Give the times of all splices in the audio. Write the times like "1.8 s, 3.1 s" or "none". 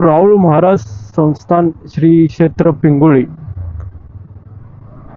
none